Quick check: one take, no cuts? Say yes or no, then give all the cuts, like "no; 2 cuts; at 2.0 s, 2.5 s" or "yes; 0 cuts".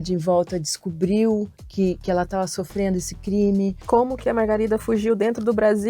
no; 1 cut; at 3.8 s